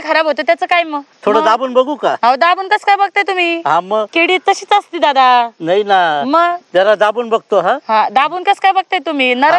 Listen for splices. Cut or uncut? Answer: cut